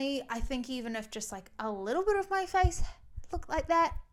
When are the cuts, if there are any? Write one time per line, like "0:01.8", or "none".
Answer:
none